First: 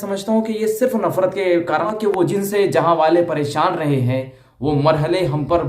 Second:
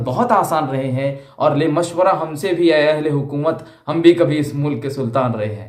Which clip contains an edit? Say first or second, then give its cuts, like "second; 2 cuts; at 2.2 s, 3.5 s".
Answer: first; 1 cut; at 1.9 s